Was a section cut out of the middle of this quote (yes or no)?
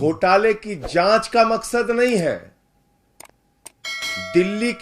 no